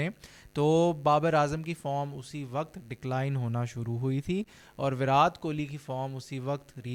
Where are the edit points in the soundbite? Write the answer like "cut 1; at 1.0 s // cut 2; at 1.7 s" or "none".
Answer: none